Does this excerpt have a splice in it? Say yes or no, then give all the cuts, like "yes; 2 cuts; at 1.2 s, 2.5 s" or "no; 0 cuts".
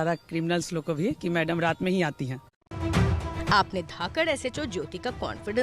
no; 0 cuts